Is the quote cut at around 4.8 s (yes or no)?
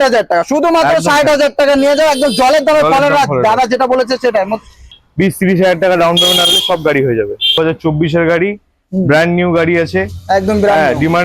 yes